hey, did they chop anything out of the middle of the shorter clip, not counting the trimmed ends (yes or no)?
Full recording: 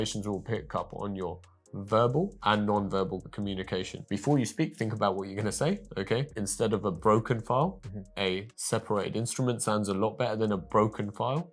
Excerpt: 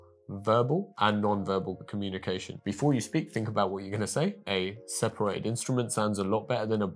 yes